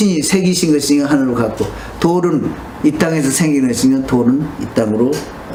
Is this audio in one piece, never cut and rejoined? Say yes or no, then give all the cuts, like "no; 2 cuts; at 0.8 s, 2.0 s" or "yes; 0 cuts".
yes; 0 cuts